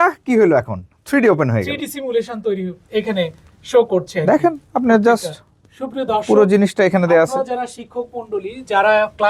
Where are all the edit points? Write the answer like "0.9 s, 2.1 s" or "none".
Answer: none